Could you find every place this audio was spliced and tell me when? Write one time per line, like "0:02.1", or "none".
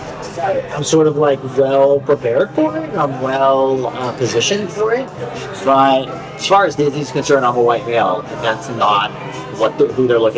0:06.1

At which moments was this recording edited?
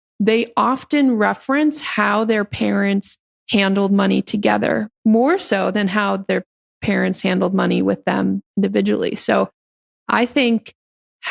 none

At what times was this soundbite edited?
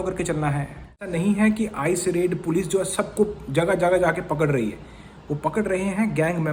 0:01.1

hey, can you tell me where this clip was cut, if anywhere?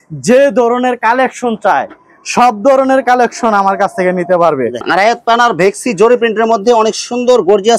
0:04.8

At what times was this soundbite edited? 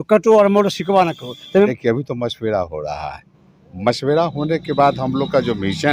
0:01.7

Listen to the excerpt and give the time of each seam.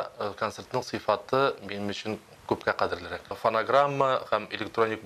0:03.4

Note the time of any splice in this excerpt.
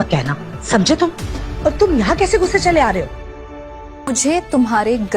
0:04.1

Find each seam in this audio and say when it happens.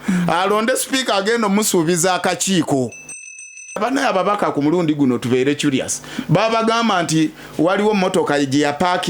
0:03.6

